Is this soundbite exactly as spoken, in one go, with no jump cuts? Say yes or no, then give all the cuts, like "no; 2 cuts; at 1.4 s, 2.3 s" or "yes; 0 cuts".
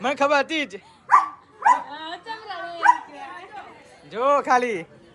yes; 0 cuts